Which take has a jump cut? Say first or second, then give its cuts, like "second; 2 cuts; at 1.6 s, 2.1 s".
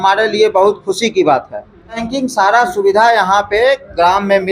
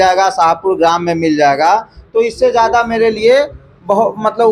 first; 1 cut; at 2.0 s